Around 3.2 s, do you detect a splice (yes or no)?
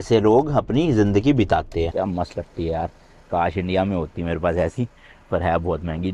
no